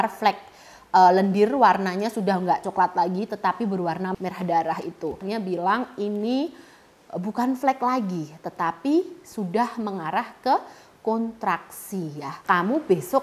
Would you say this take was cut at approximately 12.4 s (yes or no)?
yes